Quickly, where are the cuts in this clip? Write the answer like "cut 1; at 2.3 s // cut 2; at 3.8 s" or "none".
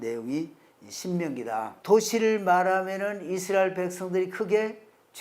cut 1; at 1.7 s